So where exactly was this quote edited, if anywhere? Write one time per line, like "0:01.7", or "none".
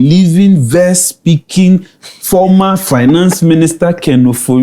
none